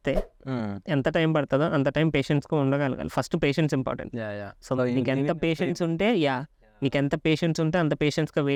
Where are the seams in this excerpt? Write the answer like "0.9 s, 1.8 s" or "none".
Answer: none